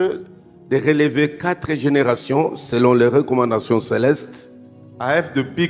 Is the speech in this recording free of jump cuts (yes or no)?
yes